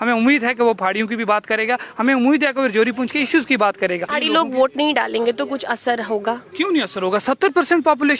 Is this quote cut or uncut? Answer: cut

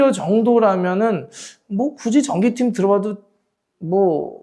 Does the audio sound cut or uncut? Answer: uncut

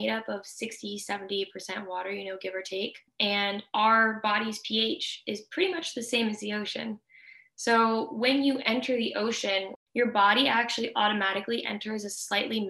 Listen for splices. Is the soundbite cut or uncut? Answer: cut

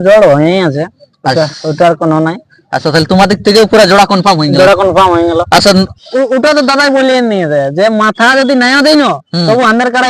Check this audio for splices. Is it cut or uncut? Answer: cut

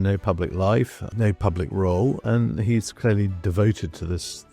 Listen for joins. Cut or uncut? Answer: cut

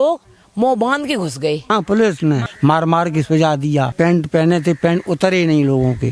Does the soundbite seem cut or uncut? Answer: cut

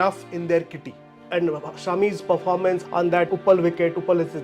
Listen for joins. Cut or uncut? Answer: cut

